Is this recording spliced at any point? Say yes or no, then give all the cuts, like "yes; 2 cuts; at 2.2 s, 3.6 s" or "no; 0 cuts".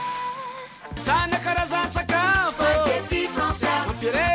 no; 0 cuts